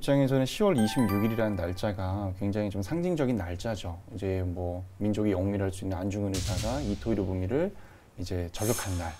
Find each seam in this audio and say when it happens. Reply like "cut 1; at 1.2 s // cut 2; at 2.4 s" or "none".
none